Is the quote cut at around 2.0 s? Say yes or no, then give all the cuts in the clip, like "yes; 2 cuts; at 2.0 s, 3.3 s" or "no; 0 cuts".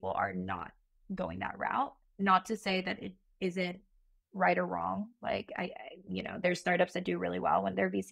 yes; 1 cut; at 2.0 s